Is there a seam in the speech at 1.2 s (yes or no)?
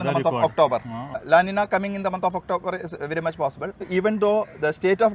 yes